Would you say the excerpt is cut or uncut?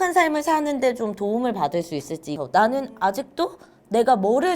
cut